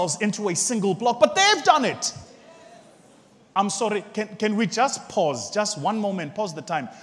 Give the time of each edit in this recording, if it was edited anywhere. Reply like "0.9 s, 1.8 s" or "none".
3.6 s